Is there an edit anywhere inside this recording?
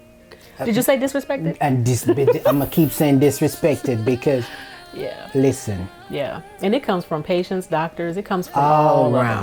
no; 0 cuts

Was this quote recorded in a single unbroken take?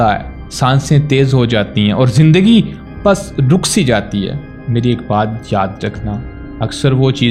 yes; 0 cuts

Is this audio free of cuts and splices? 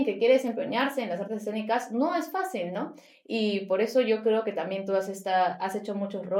yes; 0 cuts

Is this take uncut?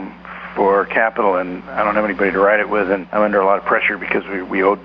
no; 2 cuts; at 1.6 s, 3.1 s

